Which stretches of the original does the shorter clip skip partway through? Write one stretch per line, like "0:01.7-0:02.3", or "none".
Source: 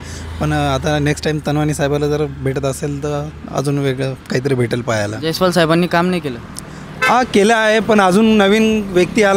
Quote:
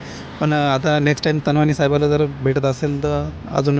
none